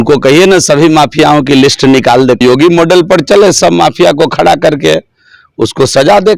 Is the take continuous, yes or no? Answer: no